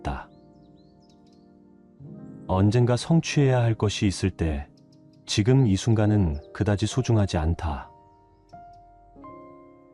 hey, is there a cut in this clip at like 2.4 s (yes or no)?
no